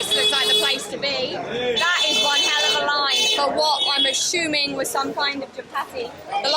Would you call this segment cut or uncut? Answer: uncut